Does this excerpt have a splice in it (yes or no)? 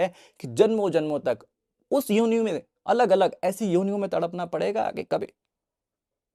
no